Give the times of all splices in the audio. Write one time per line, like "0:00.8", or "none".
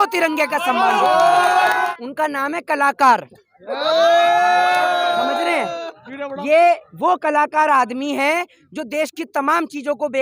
0:01.9